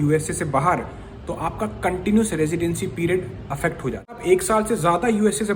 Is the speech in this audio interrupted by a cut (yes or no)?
yes